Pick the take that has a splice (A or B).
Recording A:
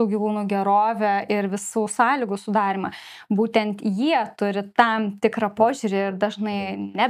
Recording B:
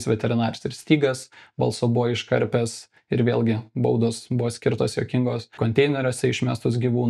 B